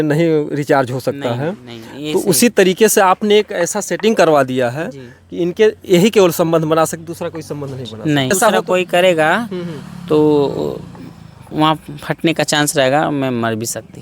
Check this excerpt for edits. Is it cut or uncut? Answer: cut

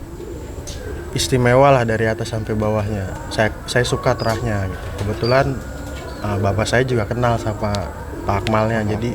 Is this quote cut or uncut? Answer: uncut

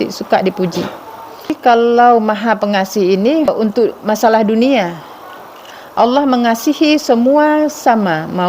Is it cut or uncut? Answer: cut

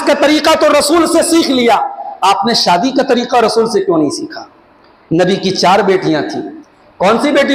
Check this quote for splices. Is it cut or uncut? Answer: uncut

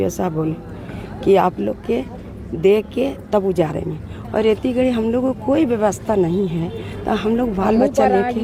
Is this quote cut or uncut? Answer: uncut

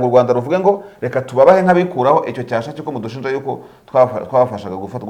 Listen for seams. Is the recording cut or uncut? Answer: uncut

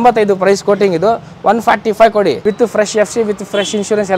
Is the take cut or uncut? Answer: cut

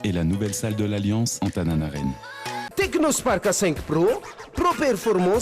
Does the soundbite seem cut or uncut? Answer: cut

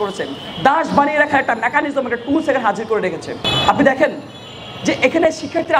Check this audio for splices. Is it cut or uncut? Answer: uncut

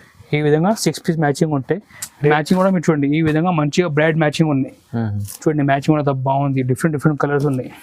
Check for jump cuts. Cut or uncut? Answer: cut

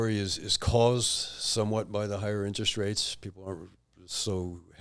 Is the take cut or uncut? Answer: uncut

